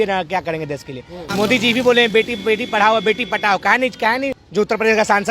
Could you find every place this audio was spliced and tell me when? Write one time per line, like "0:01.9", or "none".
0:01.3
0:04.4